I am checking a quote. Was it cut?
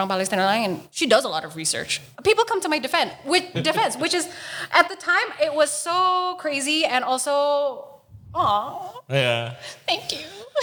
no; 0 cuts

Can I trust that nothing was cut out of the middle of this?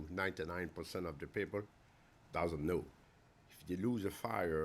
no; 1 cut; at 3.0 s

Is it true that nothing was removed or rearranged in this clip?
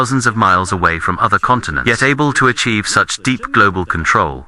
no; 1 cut; at 1.7 s

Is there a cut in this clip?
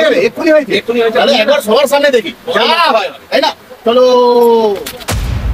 no; 0 cuts

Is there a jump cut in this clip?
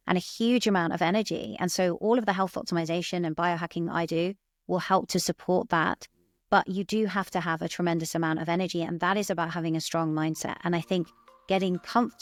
no; 0 cuts

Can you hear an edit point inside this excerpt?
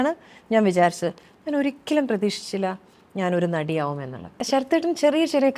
yes; 1 cut; at 4.4 s

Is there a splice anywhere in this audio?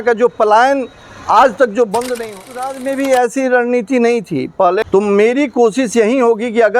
yes; 2 cuts; at 2.5 s, 4.8 s

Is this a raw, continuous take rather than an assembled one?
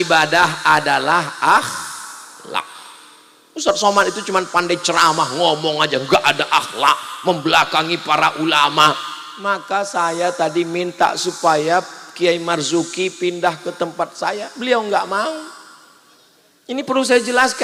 yes; 0 cuts

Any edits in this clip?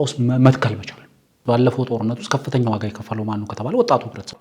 yes; 1 cut; at 1.3 s

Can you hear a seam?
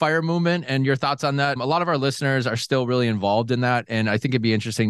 no; 0 cuts

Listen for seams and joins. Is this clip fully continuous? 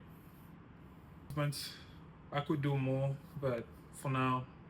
no; 1 cut; at 1.3 s

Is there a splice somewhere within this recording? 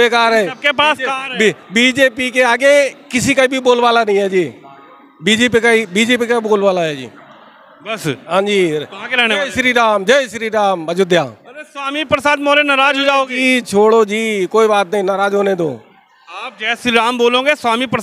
no; 0 cuts

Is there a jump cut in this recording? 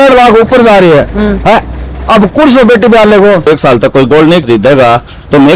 yes; 2 cuts; at 3.5 s, 4.4 s

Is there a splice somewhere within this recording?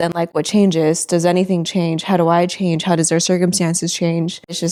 no; 0 cuts

